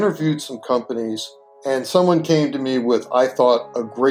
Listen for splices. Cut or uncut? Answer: uncut